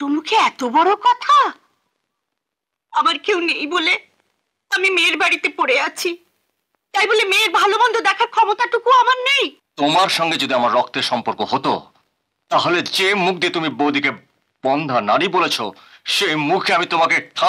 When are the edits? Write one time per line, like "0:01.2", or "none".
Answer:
0:09.6